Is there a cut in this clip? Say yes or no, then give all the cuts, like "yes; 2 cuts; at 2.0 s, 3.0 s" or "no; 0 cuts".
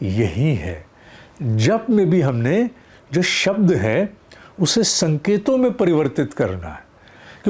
no; 0 cuts